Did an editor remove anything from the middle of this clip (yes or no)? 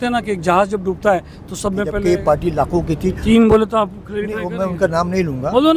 yes